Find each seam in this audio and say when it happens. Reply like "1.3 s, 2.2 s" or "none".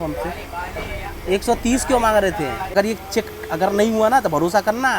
2.7 s

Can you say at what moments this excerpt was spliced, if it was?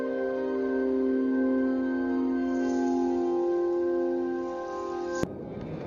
none

